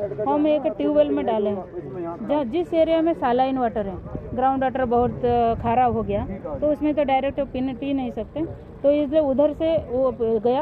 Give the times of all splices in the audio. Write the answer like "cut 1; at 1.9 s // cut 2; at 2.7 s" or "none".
none